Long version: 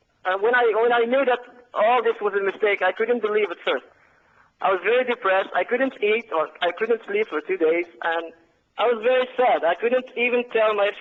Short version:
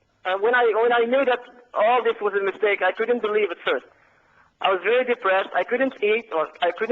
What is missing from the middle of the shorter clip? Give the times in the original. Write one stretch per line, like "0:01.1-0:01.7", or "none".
none

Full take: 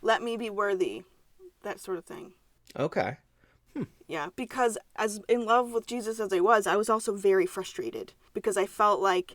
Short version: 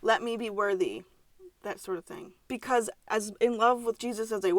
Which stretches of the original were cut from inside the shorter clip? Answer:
0:02.4-0:04.3

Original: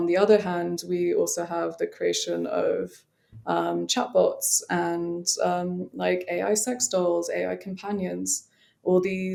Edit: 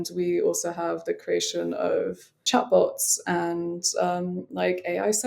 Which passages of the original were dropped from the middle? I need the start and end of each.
0:03.2-0:03.9

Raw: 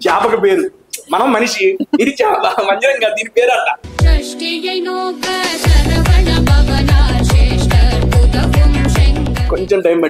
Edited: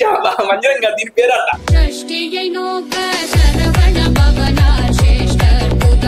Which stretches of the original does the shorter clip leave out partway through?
0:03.8-0:03.9

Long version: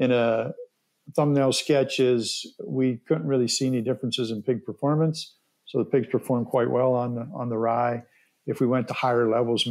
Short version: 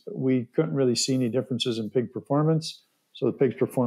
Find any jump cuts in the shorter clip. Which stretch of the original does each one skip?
none

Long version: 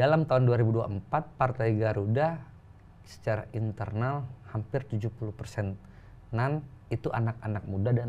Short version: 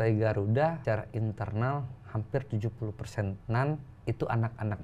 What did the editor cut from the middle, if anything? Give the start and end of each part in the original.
0:02.4-0:03.2
0:05.8-0:06.2

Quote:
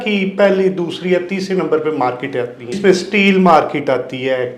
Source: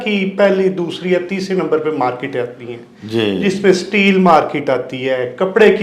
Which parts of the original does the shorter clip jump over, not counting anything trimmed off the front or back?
0:02.8-0:03.6

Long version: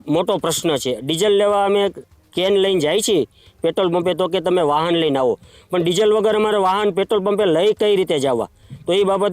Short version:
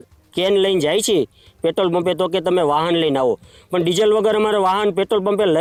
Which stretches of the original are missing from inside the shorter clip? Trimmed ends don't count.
none

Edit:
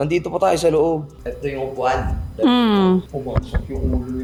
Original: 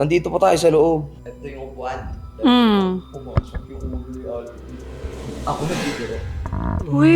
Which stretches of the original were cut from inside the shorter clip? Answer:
none

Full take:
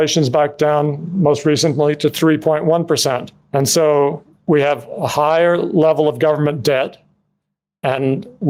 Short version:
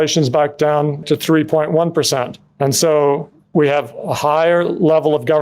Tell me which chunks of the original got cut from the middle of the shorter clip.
0:01.0-0:02.0

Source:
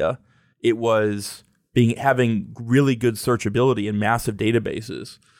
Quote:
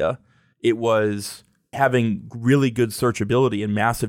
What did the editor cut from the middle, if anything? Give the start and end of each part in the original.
0:01.7-0:01.9

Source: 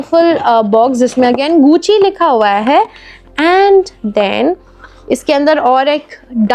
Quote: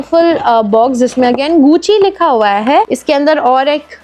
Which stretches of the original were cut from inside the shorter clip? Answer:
0:03.0-0:05.2

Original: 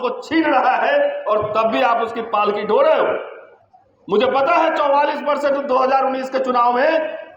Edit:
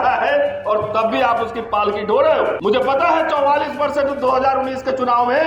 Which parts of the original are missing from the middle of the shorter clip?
0:03.2-0:04.1

